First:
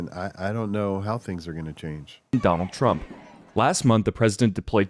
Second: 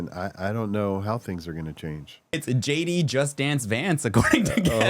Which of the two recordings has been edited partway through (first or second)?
second